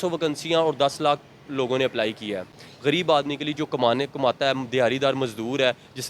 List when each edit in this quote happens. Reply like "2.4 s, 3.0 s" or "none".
2.6 s